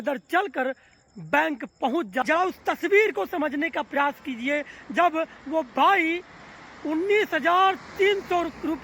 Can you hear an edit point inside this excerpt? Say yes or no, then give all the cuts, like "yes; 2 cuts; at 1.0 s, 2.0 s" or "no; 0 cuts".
yes; 1 cut; at 2.2 s